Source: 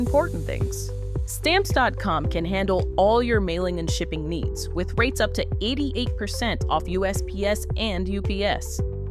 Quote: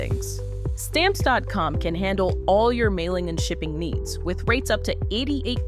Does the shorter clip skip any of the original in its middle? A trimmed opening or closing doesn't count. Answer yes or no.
no